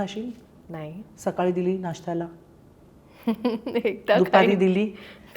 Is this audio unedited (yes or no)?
yes